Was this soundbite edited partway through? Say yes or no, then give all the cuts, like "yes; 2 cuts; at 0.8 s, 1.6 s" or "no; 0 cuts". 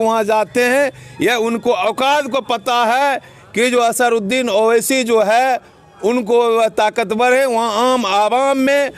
no; 0 cuts